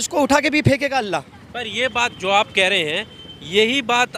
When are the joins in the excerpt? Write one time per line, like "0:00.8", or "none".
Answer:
none